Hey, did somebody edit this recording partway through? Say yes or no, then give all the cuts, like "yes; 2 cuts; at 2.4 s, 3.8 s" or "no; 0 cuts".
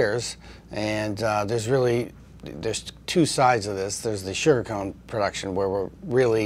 no; 0 cuts